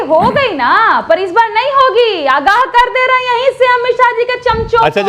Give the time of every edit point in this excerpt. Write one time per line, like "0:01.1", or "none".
none